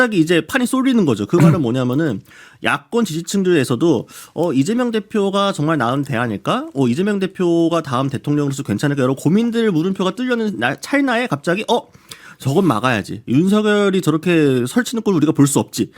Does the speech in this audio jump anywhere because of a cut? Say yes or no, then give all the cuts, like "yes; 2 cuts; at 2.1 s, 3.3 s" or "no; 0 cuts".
no; 0 cuts